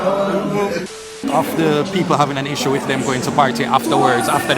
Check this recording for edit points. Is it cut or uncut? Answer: cut